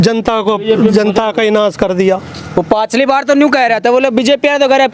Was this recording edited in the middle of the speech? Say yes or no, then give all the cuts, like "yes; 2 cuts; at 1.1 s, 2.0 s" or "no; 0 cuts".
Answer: no; 0 cuts